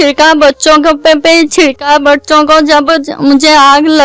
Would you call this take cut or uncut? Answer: uncut